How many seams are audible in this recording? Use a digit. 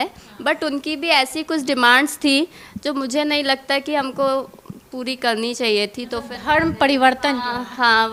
0